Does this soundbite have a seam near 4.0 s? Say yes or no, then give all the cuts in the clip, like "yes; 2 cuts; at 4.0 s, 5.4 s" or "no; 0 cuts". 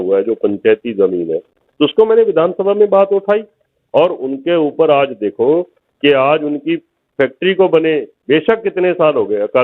no; 0 cuts